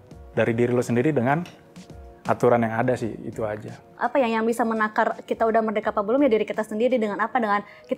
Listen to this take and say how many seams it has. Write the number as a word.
one